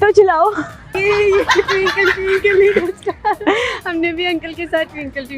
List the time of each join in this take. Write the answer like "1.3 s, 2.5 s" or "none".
1.0 s